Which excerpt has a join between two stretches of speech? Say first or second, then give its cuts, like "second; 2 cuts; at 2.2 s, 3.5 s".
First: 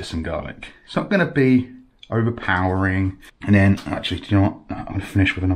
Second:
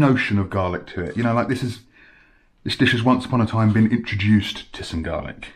first; 1 cut; at 3.2 s